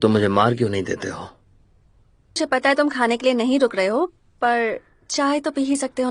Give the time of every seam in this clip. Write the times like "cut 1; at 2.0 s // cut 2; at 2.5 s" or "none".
cut 1; at 2.4 s